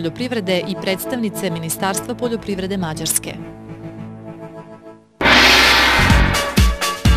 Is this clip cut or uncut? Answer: cut